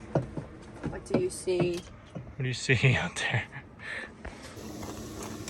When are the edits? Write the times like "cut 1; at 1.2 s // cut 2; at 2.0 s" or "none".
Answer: cut 1; at 4.6 s